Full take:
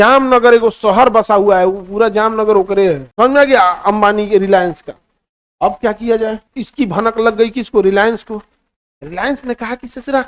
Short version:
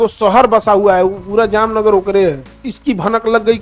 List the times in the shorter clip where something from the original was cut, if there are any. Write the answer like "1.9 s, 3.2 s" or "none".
2.5 s